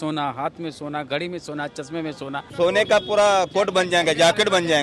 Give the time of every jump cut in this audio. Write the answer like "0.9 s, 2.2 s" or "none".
2.4 s